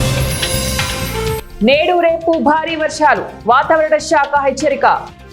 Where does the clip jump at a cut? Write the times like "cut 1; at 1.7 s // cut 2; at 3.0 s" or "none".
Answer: none